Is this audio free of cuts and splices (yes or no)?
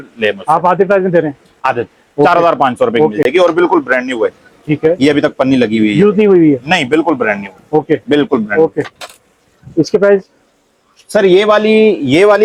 yes